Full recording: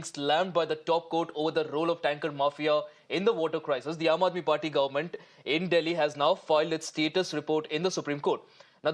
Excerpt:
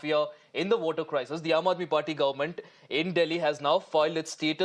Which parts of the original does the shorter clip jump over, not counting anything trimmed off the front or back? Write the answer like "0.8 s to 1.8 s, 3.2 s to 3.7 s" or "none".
none